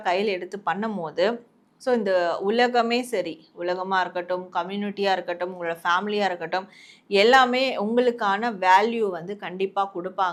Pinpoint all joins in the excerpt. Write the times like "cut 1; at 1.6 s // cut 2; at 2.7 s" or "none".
none